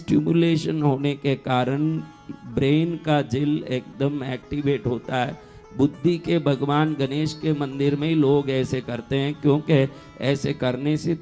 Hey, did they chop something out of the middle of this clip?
no; 0 cuts

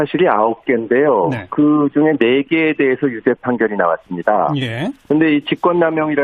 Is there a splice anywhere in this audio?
no; 0 cuts

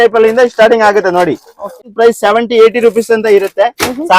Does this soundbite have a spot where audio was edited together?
yes; 1 cut; at 1.9 s

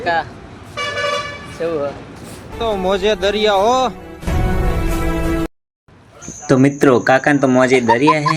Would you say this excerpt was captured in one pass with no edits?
yes; 0 cuts

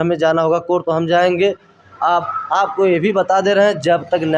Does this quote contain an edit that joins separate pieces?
no; 0 cuts

